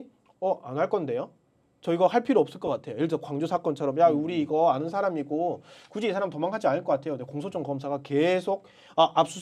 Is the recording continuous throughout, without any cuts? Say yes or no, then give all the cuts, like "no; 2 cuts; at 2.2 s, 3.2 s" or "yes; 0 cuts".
yes; 0 cuts